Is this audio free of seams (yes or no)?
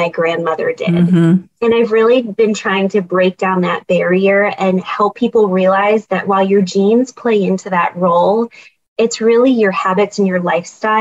yes